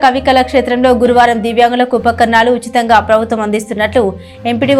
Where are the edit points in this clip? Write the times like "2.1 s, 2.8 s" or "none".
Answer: none